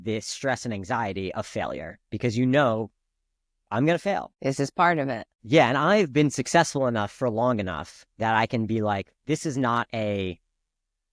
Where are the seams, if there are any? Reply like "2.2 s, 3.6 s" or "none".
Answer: 4.3 s, 5.3 s